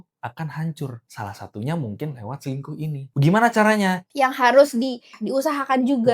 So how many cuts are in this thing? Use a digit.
4